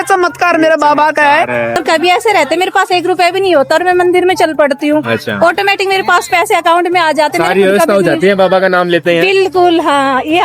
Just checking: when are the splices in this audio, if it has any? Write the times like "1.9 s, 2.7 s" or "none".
1.8 s